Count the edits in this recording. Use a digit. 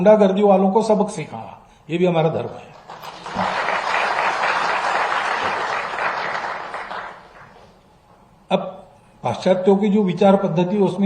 0